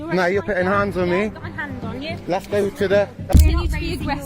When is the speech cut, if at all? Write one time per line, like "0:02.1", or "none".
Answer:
0:03.3